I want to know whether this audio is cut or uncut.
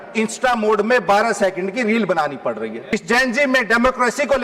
cut